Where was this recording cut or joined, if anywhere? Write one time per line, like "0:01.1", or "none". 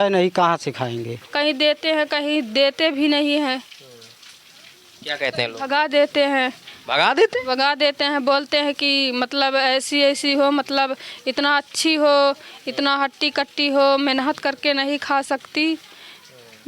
0:01.2